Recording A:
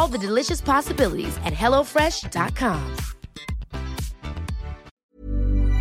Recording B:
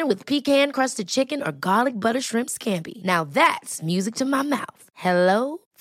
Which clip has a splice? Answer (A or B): A